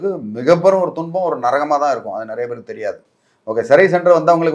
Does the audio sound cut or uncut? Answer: uncut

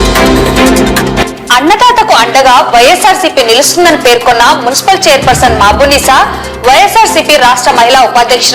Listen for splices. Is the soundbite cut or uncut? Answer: cut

